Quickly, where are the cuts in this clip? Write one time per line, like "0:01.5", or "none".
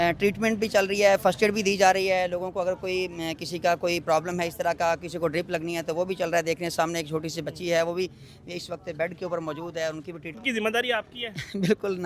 0:10.4